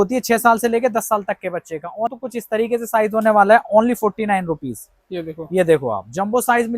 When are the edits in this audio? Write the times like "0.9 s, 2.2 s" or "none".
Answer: 2.1 s